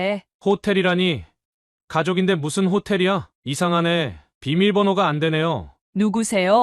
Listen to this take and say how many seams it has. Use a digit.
2